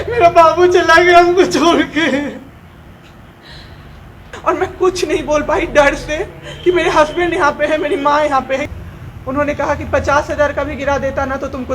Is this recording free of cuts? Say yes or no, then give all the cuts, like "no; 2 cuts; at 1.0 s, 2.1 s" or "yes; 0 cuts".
no; 2 cuts; at 4.3 s, 8.6 s